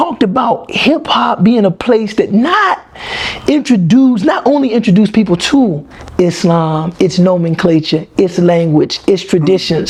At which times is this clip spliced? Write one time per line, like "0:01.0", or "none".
none